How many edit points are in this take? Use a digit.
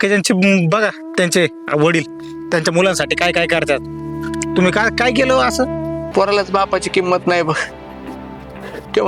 1